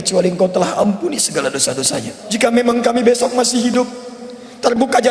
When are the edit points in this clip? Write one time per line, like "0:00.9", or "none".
0:02.2